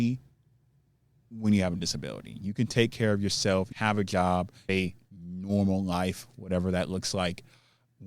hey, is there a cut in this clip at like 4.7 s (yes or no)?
yes